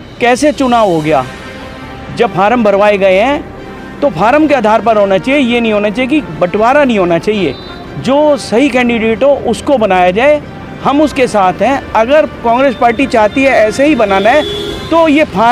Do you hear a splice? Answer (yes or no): no